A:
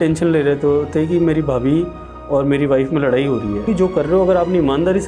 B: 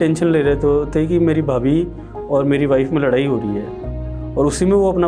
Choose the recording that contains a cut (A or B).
A